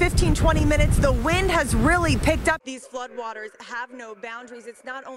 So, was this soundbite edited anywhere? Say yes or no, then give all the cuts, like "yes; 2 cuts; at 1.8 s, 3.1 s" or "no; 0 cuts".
yes; 1 cut; at 2.6 s